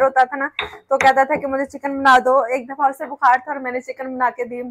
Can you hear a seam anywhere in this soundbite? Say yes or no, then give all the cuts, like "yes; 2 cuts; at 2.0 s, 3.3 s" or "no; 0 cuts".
no; 0 cuts